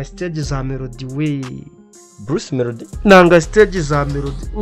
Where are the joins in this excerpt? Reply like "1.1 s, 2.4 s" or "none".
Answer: none